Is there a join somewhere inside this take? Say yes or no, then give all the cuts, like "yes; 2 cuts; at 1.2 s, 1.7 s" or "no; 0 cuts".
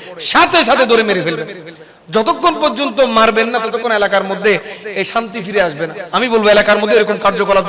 yes; 1 cut; at 6.0 s